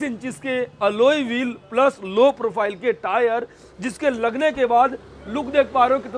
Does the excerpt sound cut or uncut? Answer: uncut